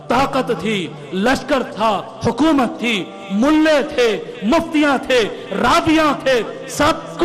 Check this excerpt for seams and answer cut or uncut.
uncut